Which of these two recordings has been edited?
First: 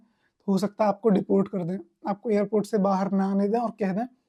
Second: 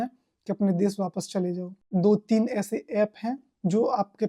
second; 1 cut; at 1.9 s

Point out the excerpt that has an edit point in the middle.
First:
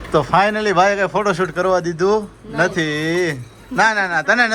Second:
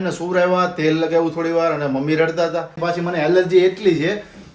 second; 1 cut; at 2.8 s

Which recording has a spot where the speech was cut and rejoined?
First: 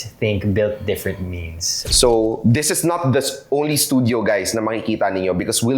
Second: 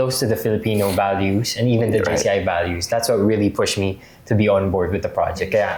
first; 1 cut; at 1.8 s

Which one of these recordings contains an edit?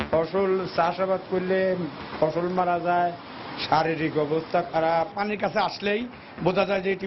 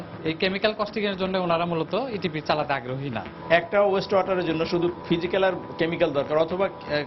first; 1 cut; at 5.1 s

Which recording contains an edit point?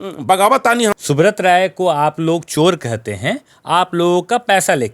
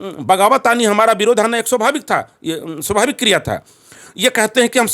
first; 1 cut; at 0.9 s

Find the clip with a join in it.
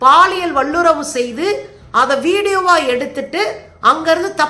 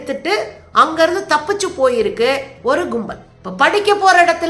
second; 1 cut; at 3.2 s

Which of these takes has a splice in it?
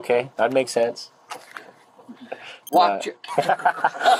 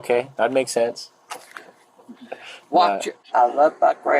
second; 1 cut; at 3.2 s

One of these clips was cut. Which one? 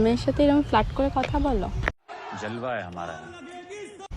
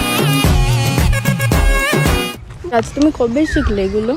second; 1 cut; at 2.7 s

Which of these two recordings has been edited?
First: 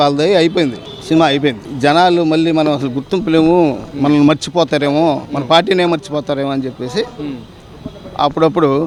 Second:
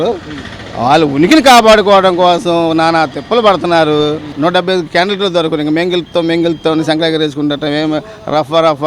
second; 1 cut; at 4.3 s

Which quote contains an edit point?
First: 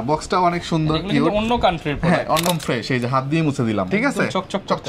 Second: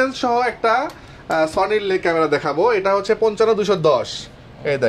first; 2 cuts; at 2.4 s, 3.9 s

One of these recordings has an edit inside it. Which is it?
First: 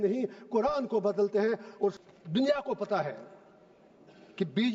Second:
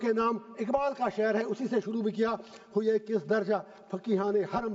first; 1 cut; at 1.9 s

